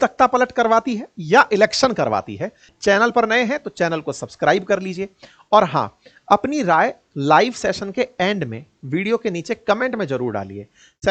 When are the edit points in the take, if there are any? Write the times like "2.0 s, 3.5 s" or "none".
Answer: 2.6 s

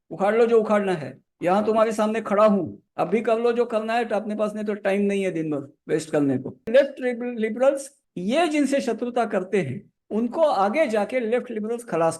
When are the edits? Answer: 6.7 s

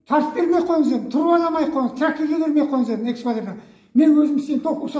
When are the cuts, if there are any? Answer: none

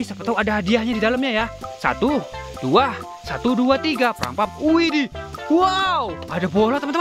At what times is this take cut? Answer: none

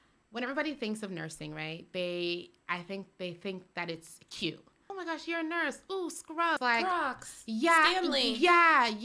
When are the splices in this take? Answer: 4.8 s, 6.6 s

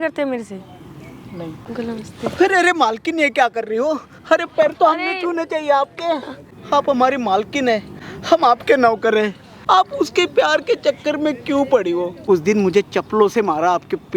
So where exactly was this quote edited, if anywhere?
1.6 s, 6.4 s, 9.5 s, 12.1 s

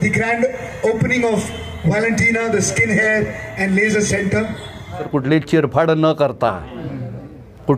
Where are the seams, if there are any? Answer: 5.0 s

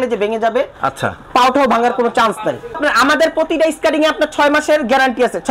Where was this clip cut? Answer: 2.8 s

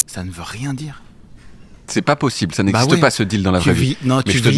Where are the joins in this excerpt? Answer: none

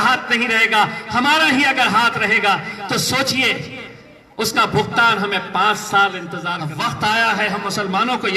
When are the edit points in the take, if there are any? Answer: 6.6 s

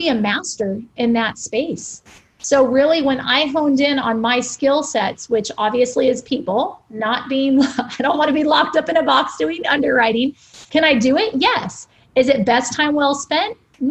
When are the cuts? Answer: none

